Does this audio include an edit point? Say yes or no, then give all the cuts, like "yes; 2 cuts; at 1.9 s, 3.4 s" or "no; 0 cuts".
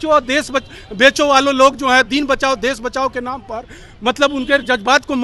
no; 0 cuts